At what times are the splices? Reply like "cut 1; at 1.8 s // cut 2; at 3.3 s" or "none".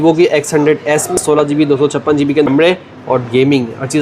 cut 1; at 1.2 s // cut 2; at 2.5 s